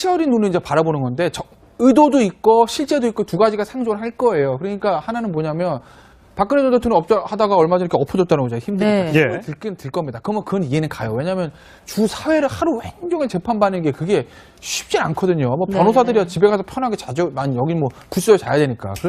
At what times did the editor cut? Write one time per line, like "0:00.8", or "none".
none